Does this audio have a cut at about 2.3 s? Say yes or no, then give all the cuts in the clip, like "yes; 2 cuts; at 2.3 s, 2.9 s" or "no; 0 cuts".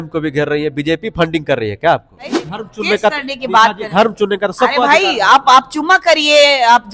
yes; 1 cut; at 2.3 s